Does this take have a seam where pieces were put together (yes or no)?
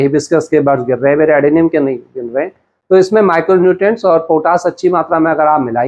no